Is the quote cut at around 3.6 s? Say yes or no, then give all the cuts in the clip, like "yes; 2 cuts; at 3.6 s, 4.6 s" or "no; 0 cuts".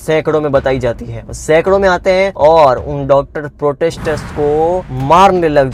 no; 0 cuts